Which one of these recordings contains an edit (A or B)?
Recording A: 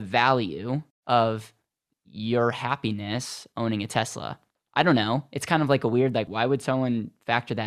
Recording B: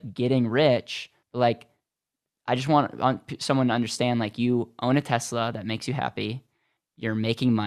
A